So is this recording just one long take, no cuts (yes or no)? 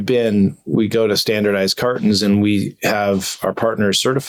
yes